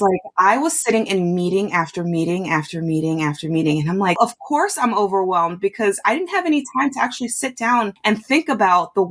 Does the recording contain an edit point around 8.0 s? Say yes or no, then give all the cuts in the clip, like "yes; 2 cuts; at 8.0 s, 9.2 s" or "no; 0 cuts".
yes; 2 cuts; at 4.2 s, 8.0 s